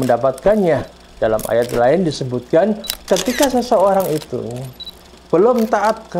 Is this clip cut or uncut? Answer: cut